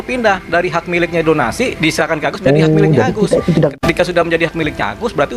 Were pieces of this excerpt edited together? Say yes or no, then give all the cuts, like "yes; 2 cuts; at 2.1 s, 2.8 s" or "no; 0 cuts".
yes; 1 cut; at 3.7 s